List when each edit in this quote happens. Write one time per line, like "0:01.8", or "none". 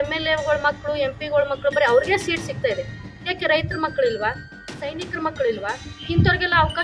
0:05.9